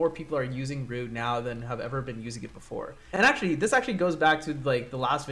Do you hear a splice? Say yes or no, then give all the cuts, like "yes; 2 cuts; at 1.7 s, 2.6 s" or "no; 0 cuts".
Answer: no; 0 cuts